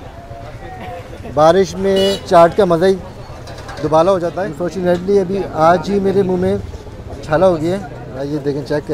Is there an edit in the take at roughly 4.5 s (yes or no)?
yes